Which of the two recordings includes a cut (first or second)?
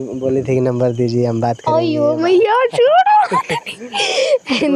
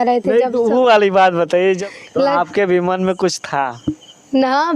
second